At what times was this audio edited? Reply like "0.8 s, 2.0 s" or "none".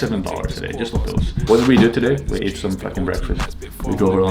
1.4 s